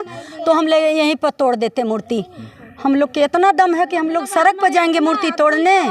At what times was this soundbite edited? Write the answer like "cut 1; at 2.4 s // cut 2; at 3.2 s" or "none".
none